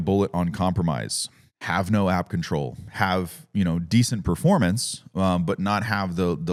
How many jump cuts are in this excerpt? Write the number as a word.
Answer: zero